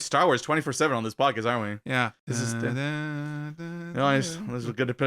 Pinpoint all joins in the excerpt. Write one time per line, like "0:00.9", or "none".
0:02.2